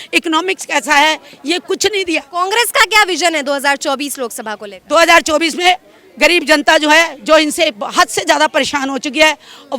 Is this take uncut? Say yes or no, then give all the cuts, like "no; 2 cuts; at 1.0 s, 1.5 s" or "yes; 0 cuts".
yes; 0 cuts